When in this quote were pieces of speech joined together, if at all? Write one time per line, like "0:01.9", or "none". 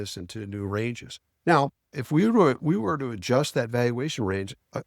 0:01.9